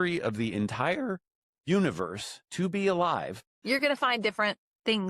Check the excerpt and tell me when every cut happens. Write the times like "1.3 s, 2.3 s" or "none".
3.5 s